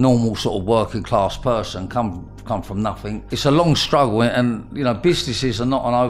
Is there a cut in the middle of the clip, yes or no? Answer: yes